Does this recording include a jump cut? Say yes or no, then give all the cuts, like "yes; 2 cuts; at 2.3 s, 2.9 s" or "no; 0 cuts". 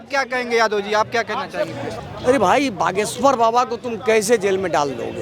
yes; 1 cut; at 2.0 s